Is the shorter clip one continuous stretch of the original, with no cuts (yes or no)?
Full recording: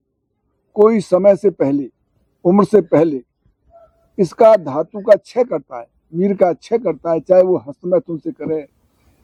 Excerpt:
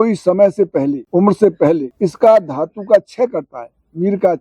no